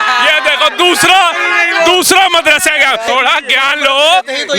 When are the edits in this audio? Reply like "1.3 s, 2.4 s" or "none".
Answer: 3.1 s